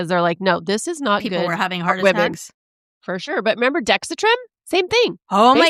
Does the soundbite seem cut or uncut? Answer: uncut